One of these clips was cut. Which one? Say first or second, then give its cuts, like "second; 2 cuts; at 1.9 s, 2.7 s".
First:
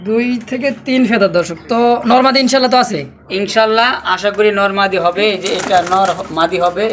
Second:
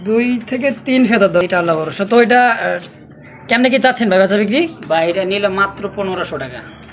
second; 1 cut; at 1.4 s